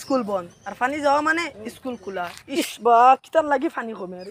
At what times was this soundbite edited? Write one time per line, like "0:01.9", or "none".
none